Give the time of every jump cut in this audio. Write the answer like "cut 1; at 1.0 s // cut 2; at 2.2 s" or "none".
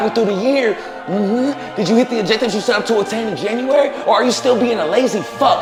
none